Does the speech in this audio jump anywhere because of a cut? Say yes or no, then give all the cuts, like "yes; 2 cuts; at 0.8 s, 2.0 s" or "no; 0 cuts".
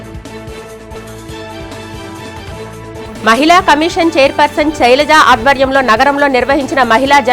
yes; 1 cut; at 0.9 s